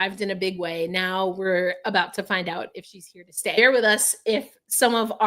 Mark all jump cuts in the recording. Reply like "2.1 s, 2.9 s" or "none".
3.6 s